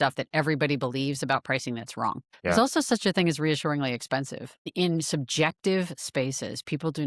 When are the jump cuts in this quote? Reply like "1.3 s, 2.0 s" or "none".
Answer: 2.3 s, 4.7 s